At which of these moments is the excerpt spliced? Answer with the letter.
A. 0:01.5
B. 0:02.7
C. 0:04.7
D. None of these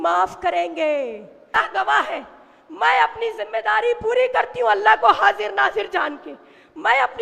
A